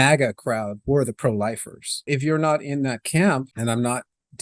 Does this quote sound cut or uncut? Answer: cut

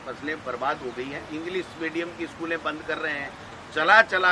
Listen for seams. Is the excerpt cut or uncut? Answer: cut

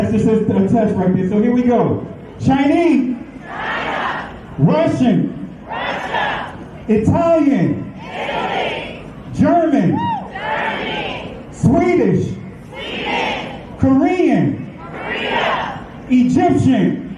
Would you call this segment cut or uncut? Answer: uncut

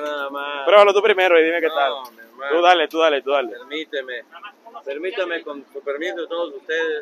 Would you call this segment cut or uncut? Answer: uncut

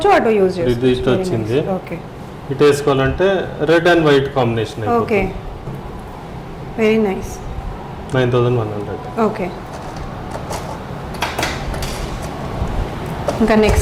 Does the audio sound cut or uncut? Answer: uncut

